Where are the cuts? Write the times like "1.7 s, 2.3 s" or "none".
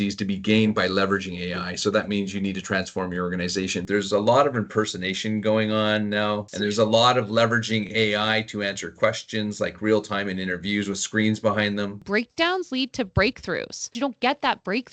3.8 s, 6.5 s, 12.0 s, 13.9 s